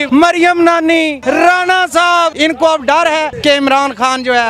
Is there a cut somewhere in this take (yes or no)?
yes